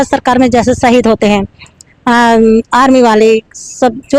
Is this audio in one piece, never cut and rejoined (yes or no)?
yes